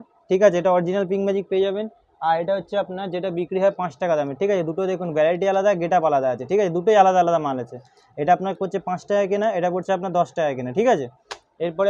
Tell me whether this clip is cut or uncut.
uncut